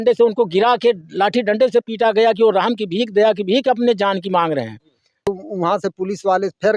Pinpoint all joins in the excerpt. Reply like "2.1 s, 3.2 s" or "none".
5.3 s